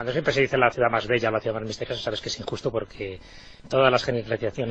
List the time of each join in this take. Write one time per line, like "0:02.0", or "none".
0:02.3